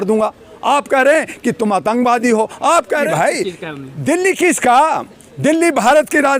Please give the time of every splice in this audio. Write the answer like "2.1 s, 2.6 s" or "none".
3.1 s